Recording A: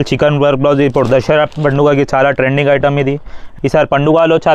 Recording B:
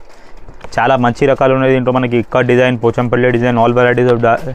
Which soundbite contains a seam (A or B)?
A